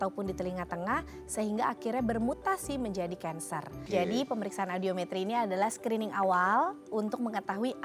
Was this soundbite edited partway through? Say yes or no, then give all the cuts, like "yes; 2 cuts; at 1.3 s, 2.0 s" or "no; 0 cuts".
yes; 1 cut; at 3.8 s